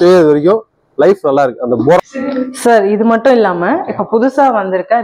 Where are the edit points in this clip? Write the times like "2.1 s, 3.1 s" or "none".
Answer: 2.1 s